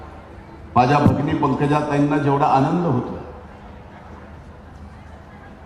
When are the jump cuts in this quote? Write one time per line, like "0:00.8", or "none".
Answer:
none